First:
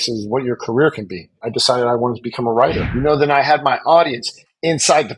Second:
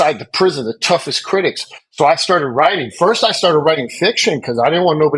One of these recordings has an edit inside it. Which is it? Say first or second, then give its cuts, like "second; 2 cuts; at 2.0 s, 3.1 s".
first; 2 cuts; at 1.5 s, 2.9 s